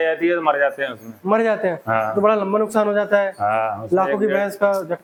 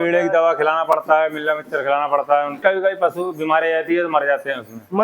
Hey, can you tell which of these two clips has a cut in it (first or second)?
second